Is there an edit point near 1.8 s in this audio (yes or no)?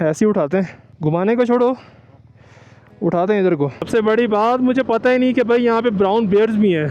no